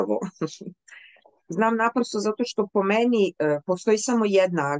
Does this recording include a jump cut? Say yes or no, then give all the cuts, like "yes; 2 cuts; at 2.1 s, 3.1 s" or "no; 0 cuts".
no; 0 cuts